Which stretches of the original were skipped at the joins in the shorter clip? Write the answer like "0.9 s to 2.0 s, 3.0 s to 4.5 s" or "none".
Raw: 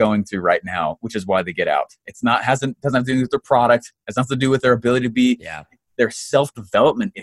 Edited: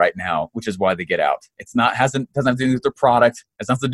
none